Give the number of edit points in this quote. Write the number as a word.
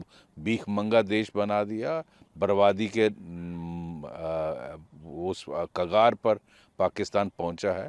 zero